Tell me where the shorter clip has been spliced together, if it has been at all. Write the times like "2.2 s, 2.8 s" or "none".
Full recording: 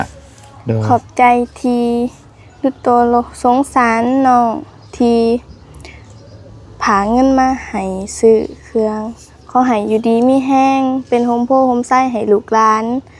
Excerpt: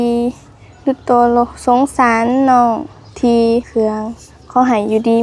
3.7 s